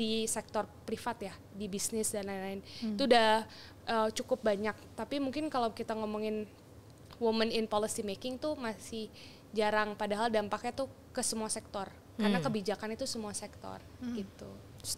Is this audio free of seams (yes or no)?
yes